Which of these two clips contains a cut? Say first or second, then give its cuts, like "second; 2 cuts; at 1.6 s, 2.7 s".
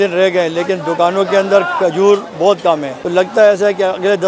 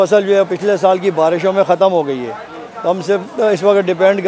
first; 1 cut; at 3.3 s